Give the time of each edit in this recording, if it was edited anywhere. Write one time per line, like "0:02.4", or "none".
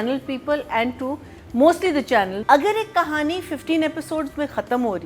0:02.4